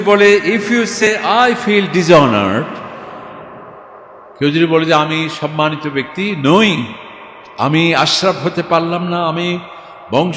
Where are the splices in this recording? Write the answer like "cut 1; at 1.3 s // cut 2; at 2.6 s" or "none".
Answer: cut 1; at 1.0 s

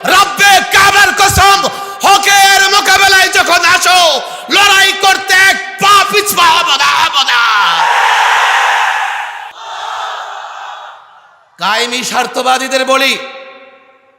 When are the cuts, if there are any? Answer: cut 1; at 9.5 s

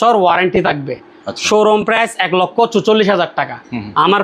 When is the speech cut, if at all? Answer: none

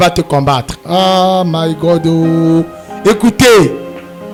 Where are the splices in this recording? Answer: none

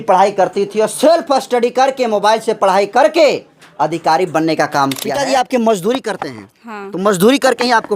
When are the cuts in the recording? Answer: cut 1; at 5.1 s

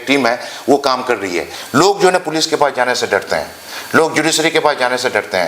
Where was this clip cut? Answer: cut 1; at 1.5 s

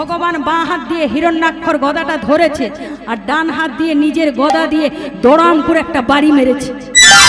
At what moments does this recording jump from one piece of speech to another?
none

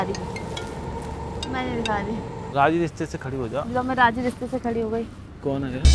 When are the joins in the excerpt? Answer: cut 1; at 2.4 s

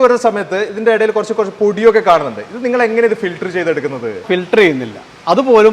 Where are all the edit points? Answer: cut 1; at 4.2 s

